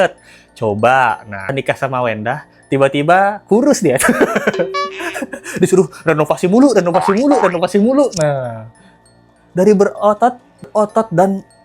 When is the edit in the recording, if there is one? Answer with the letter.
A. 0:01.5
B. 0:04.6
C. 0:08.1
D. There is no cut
A